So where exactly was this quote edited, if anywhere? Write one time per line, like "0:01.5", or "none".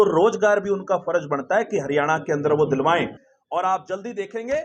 0:03.2

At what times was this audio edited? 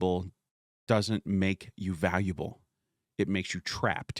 none

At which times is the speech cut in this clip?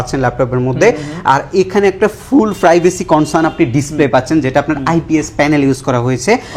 none

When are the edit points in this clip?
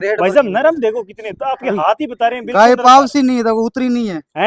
none

